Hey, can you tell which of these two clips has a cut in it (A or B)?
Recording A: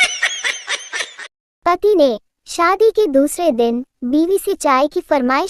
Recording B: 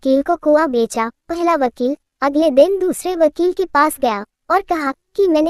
A